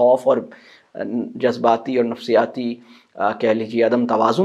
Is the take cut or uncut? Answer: uncut